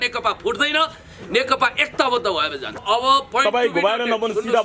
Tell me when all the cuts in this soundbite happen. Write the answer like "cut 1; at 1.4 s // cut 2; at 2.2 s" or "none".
cut 1; at 2.8 s